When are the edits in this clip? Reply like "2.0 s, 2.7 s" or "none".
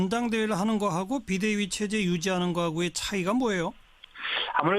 0.9 s

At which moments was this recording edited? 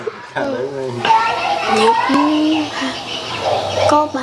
1.0 s

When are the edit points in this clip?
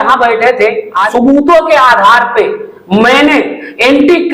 1.1 s

